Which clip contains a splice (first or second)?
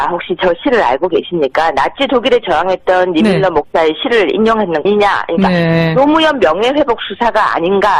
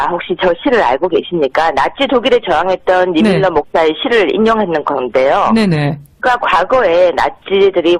second